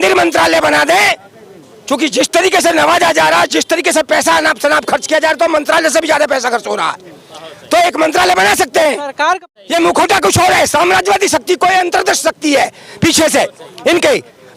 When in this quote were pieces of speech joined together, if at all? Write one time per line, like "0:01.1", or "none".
0:09.5